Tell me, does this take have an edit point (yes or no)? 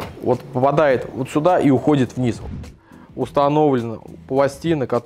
yes